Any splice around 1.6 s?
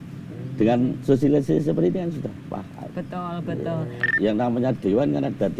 no; 1 cut; at 4.1 s

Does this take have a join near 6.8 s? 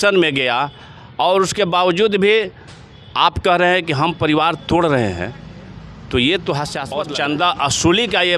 yes; 1 cut; at 6.8 s

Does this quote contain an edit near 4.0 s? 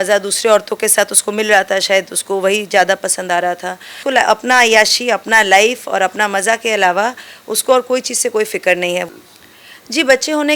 yes; 2 cuts; at 4.0 s, 9.1 s

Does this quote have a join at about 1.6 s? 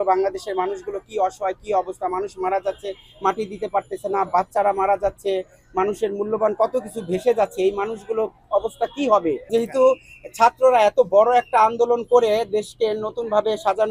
no; 1 cut; at 9.4 s

